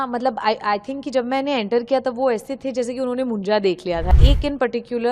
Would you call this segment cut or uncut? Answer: cut